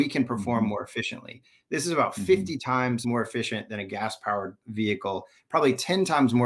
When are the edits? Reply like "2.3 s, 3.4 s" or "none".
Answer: 3.0 s, 4.6 s